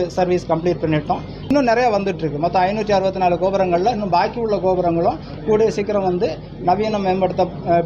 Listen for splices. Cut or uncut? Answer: cut